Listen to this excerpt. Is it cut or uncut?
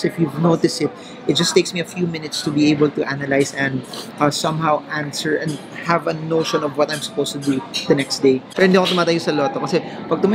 cut